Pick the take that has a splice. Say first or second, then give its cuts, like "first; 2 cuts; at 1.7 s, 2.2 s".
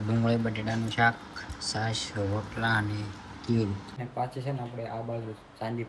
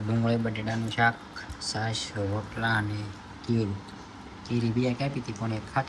first; 1 cut; at 4.0 s